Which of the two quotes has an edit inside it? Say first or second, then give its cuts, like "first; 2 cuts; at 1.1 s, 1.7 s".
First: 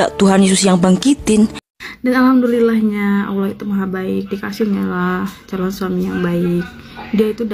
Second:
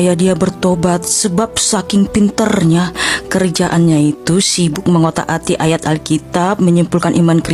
first; 1 cut; at 1.6 s